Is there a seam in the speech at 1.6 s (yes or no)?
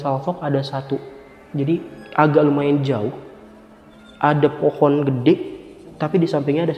no